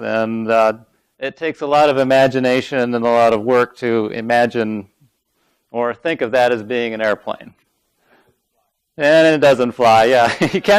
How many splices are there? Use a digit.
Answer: 1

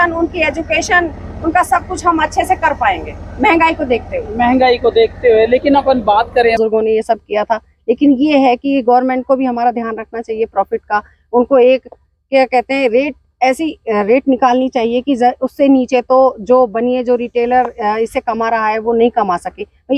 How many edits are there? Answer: 1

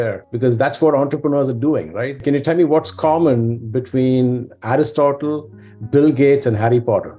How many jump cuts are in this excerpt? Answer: 1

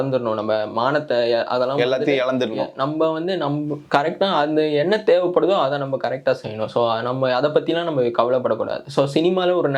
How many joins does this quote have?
0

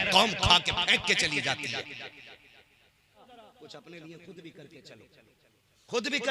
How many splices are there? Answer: 1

